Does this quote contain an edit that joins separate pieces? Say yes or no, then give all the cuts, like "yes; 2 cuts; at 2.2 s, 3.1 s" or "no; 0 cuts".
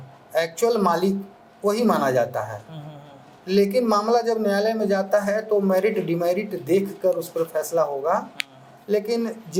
no; 0 cuts